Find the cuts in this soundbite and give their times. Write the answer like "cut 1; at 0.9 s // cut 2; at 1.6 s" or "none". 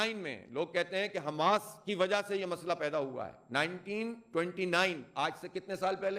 none